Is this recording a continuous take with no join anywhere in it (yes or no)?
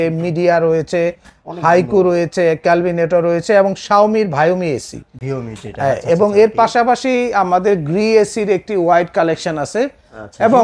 yes